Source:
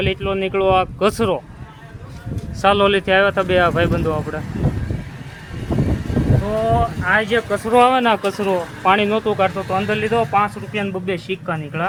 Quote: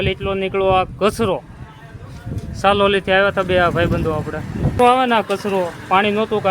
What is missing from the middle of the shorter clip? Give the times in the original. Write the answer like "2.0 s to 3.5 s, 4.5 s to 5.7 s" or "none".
4.7 s to 7.7 s

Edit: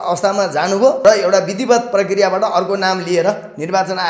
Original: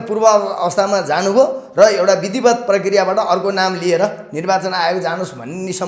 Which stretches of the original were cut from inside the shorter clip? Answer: 1.5 s to 1.7 s

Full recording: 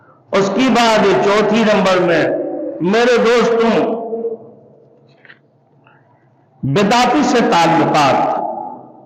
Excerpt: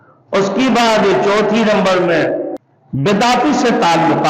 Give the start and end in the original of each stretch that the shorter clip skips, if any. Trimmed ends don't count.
2.6 s to 6.3 s

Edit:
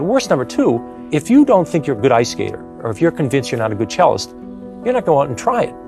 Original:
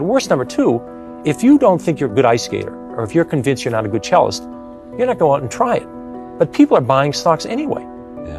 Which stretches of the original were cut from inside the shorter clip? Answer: 0.9 s to 1.1 s

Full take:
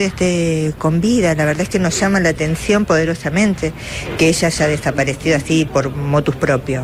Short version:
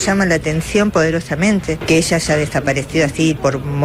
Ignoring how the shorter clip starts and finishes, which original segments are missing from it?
3.7 s to 4.1 s

